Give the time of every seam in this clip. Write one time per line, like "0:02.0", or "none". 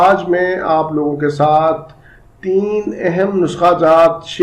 none